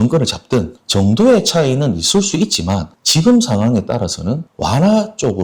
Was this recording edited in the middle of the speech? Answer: no; 0 cuts

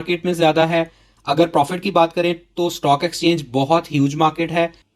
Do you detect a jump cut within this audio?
no; 0 cuts

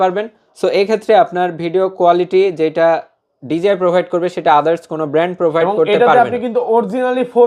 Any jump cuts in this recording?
no; 0 cuts

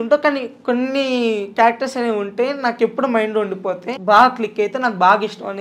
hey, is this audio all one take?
no; 1 cut; at 3.9 s

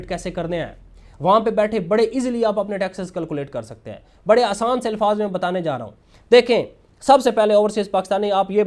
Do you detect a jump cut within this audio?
no; 0 cuts

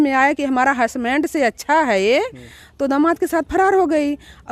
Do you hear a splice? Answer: no; 0 cuts

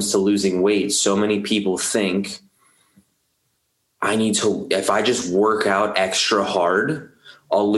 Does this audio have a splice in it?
no; 0 cuts

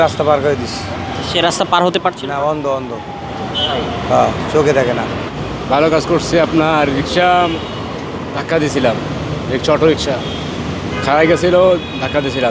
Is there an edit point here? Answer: yes; 2 cuts; at 1.2 s, 5.3 s

